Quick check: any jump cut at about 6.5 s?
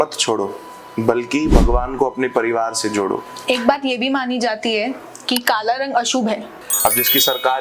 yes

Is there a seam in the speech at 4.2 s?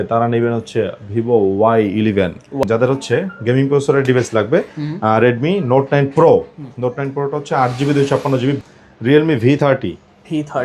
no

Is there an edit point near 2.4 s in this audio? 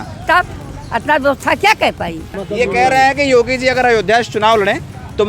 yes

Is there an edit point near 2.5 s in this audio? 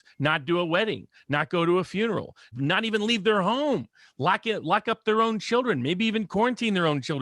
yes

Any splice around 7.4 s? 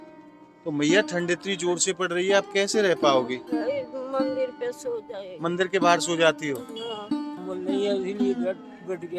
yes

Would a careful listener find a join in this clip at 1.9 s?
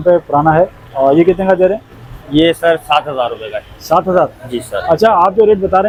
no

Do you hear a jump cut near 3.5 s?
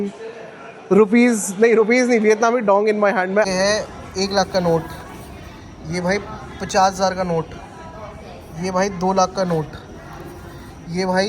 yes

